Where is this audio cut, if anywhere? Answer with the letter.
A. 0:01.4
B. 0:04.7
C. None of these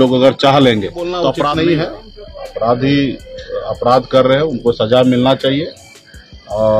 A